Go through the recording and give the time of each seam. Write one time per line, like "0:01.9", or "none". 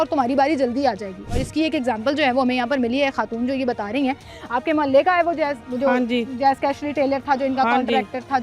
none